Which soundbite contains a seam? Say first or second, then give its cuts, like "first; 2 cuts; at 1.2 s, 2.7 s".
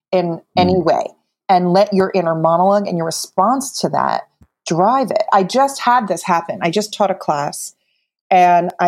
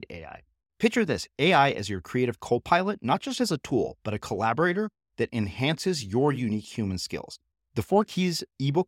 first; 1 cut; at 1.4 s